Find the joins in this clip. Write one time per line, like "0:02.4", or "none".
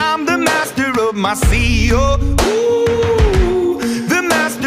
none